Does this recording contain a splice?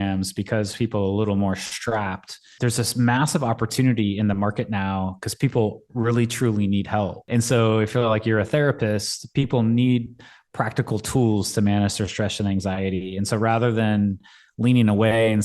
yes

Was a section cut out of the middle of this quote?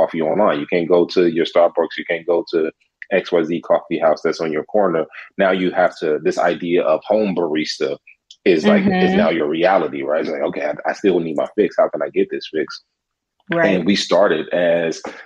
no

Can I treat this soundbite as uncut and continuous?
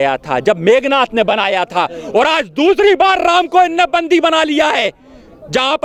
yes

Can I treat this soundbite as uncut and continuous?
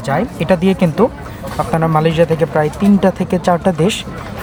yes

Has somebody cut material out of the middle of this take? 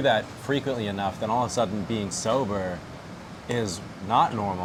no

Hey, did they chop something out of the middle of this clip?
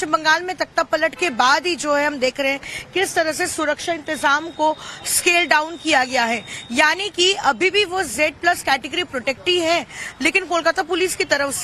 yes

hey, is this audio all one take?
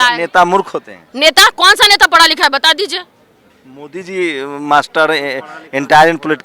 yes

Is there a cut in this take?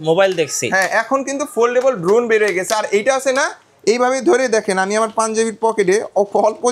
no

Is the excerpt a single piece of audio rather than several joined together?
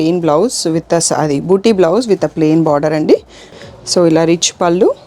no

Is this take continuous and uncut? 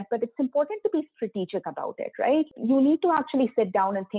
no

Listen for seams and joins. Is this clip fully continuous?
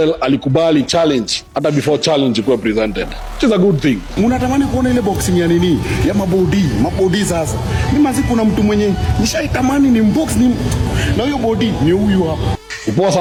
yes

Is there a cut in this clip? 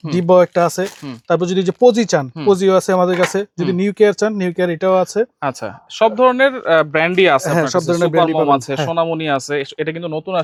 no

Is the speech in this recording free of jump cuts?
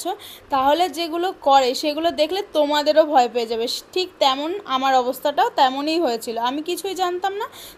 yes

